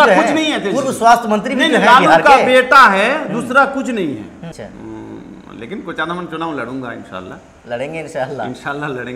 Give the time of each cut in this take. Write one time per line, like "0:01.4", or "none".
0:04.4